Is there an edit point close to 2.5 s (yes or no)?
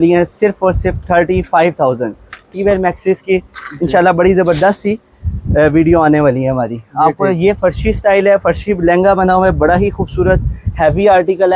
yes